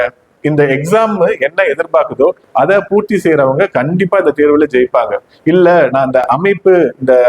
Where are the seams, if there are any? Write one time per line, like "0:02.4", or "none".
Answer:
none